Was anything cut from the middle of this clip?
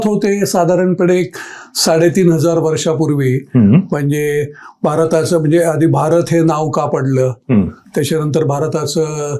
no; 0 cuts

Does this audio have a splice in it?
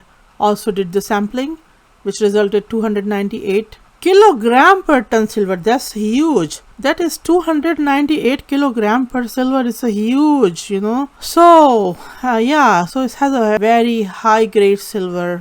yes; 1 cut; at 13.6 s

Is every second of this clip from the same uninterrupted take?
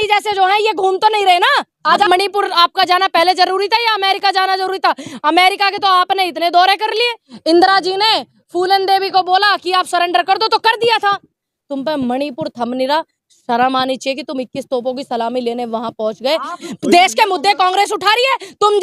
no; 4 cuts; at 2.1 s, 7.3 s, 11.5 s, 16.7 s

